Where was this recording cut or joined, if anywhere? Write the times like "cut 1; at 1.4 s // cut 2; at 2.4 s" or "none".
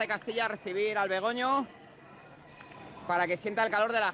none